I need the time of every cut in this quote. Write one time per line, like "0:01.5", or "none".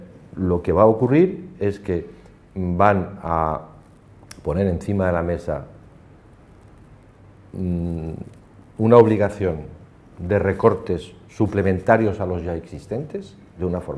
0:06.6